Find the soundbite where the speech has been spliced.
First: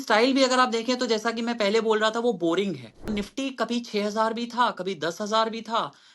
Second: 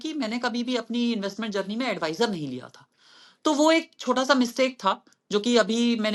first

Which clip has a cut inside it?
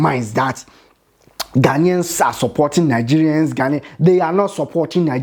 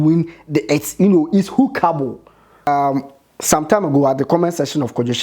second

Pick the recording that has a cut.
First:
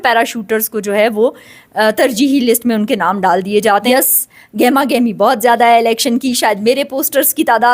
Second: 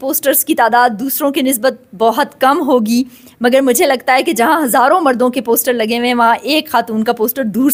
first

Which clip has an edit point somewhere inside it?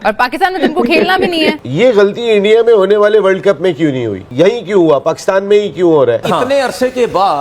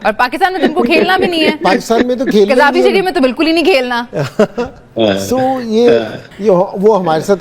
first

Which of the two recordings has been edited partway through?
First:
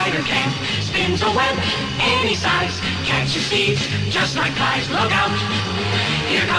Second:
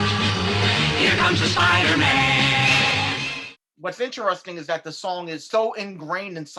second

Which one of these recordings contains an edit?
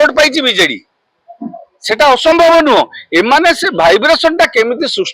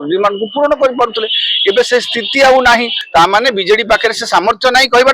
second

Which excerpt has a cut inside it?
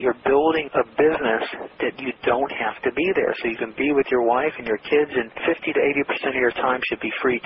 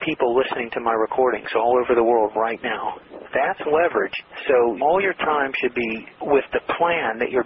second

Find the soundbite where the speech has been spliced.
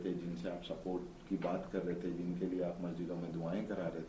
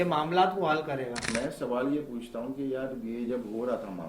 second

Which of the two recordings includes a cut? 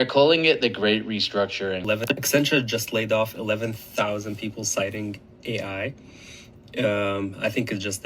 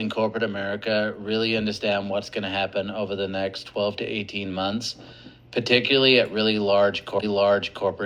first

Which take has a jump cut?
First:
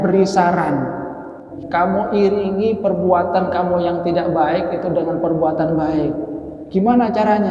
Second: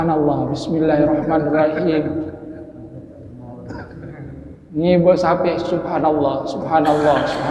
first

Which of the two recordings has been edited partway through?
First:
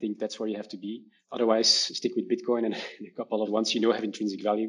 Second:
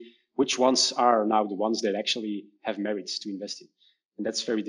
first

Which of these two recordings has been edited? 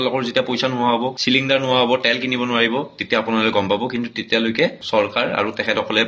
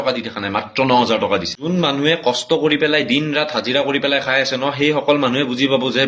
second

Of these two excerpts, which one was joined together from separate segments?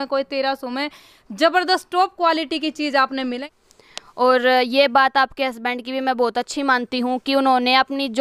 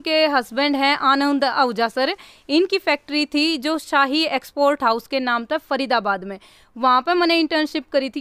first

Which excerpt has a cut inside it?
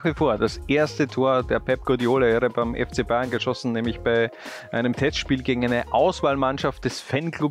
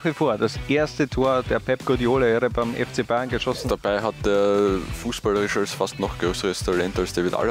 second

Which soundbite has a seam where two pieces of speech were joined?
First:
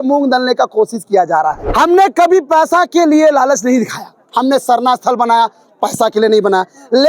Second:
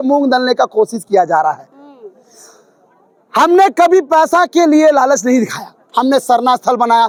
first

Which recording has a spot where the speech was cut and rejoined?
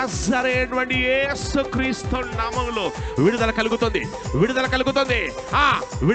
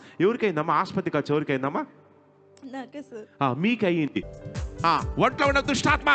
second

